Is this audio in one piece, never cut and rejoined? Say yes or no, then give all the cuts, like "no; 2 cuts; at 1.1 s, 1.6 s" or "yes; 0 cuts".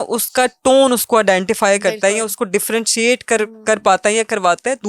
yes; 0 cuts